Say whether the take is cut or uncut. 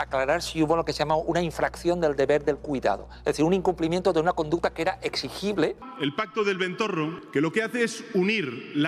cut